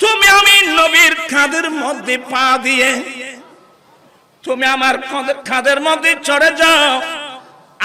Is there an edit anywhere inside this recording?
no; 0 cuts

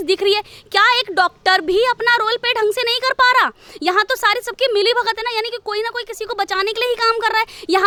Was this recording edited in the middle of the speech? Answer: no; 0 cuts

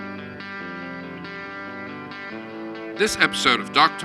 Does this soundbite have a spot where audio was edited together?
yes; 1 cut; at 3.0 s

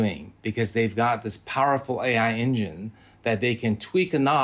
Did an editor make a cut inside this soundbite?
no; 0 cuts

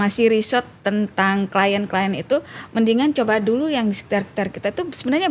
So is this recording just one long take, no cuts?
yes; 0 cuts

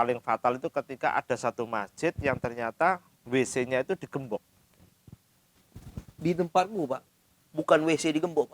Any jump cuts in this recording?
no; 0 cuts

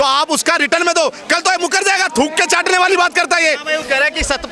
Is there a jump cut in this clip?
no; 0 cuts

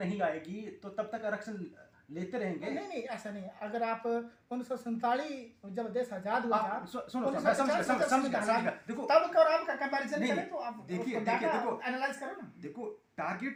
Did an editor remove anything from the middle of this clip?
no; 0 cuts

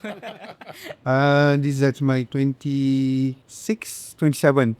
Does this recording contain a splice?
yes; 2 cuts; at 1.0 s, 3.5 s

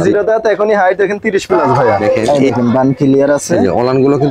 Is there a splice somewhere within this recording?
yes; 1 cut; at 2.0 s

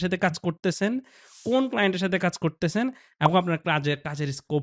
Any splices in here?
no; 0 cuts

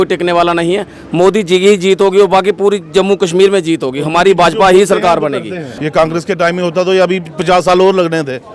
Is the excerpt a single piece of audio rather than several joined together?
no; 1 cut; at 5.6 s

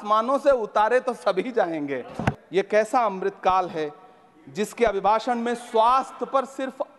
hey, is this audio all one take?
no; 1 cut; at 2.4 s

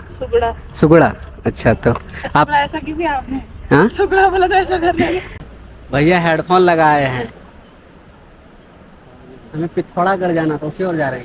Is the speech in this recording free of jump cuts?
no; 1 cut; at 5.3 s

